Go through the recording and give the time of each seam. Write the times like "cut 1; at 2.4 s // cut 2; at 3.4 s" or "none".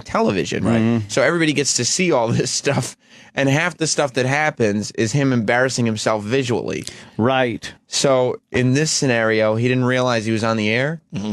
cut 1; at 7.8 s